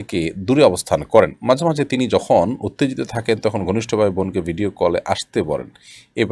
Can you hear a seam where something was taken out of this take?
no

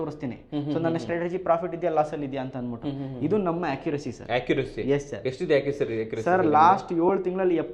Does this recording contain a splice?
no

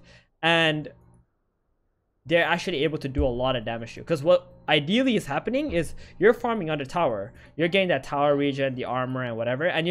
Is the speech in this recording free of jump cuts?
yes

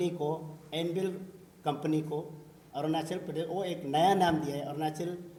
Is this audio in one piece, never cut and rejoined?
yes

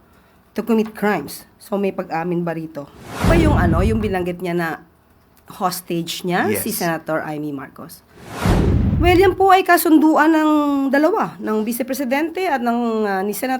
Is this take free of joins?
no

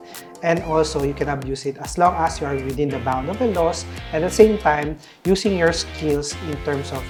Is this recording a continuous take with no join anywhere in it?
yes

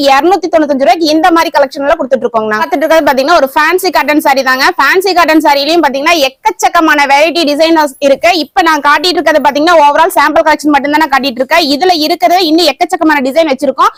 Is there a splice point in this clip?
no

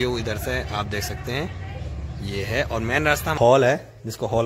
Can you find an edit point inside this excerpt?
yes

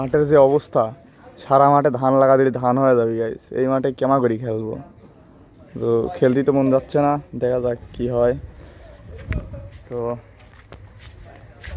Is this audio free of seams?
yes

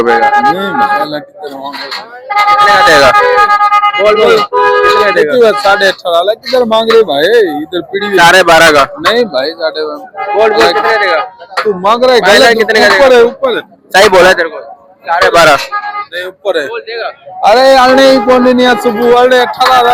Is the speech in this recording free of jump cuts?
yes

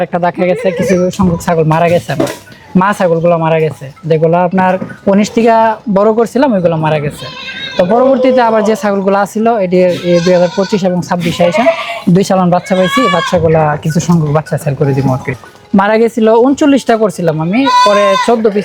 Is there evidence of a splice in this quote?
yes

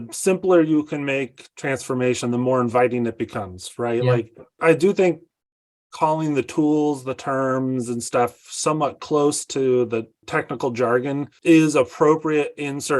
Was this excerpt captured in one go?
no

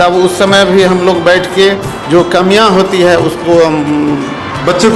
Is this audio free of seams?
yes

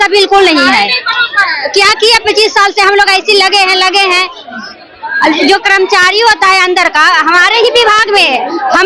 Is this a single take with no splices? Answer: yes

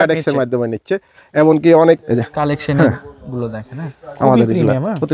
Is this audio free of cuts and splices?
no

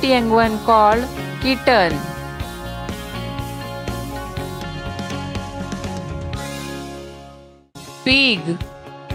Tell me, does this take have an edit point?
no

